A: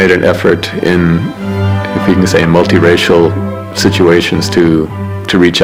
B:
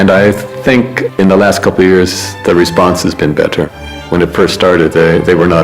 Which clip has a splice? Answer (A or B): B